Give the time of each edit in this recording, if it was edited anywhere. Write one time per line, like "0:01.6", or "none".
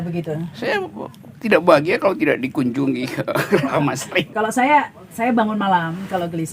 0:04.3